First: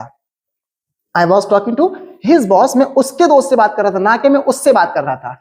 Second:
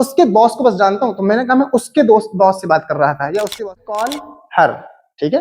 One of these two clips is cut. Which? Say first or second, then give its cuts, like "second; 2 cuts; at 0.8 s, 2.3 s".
second; 1 cut; at 3.6 s